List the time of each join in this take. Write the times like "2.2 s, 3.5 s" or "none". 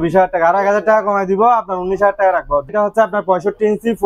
2.7 s